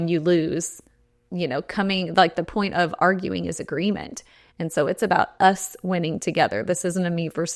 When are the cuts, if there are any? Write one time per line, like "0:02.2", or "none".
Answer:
none